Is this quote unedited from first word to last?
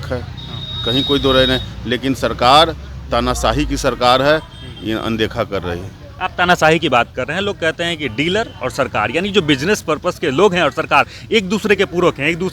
yes; 0 cuts

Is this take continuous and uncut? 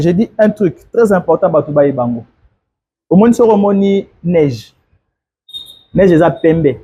yes; 0 cuts

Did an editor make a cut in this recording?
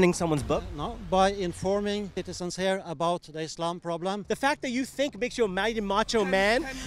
yes; 2 cuts; at 2.2 s, 4.2 s

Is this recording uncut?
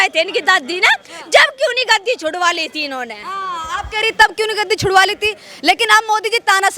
yes; 0 cuts

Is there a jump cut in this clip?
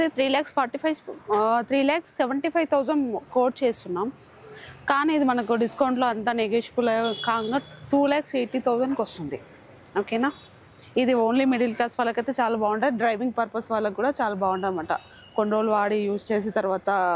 no; 0 cuts

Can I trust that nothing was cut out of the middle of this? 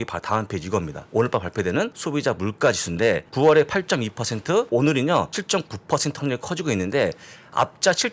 no; 5 cuts; at 1.0 s, 2.0 s, 3.3 s, 4.7 s, 5.4 s

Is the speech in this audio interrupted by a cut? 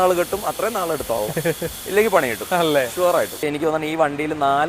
yes; 1 cut; at 3.5 s

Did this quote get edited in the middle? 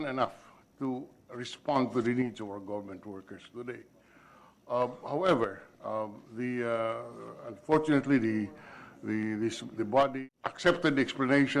yes; 1 cut; at 10.2 s

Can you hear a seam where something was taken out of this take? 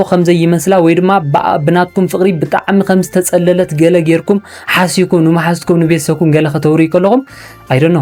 no; 0 cuts

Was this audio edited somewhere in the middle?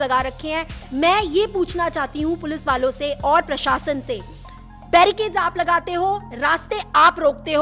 no; 0 cuts

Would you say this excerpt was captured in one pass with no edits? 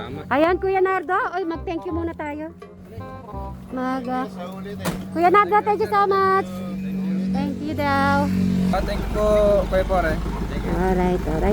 no; 1 cut; at 8.7 s

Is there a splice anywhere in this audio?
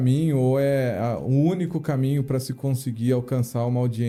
no; 0 cuts

